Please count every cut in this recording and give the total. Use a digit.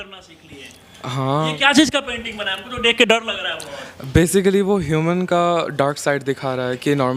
0